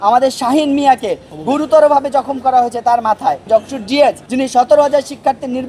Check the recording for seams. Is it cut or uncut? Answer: cut